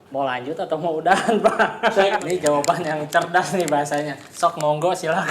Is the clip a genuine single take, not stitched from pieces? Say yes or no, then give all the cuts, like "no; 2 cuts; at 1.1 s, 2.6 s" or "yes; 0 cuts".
no; 1 cut; at 2.2 s